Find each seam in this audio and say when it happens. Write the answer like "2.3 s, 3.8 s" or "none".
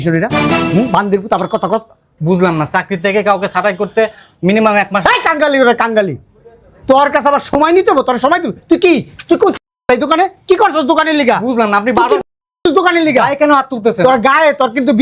none